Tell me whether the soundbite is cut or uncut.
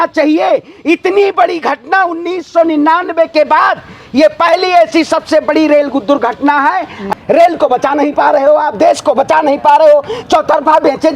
cut